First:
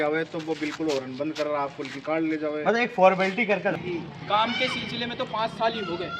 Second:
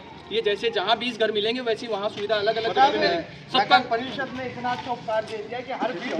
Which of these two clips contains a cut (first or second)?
first